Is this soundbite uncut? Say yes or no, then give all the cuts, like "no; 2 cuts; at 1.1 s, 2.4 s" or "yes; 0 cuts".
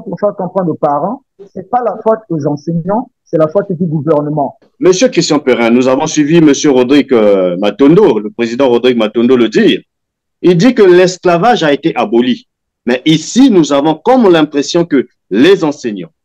no; 1 cut; at 4.6 s